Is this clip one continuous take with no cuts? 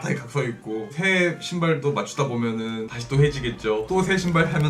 no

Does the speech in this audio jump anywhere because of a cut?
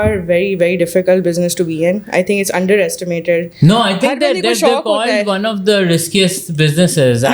no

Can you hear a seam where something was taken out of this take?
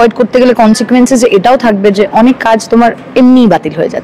no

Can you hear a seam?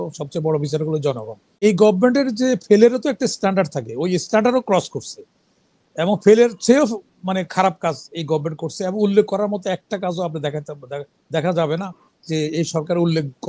yes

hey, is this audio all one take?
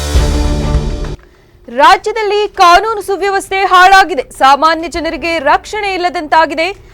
no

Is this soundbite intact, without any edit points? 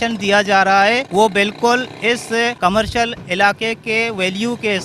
no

